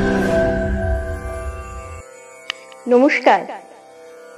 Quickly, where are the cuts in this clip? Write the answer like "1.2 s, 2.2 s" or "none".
2.4 s